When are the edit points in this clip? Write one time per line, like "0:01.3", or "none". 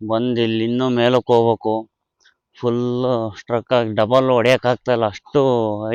none